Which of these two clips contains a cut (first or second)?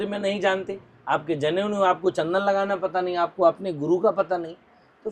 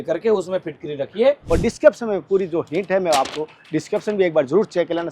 second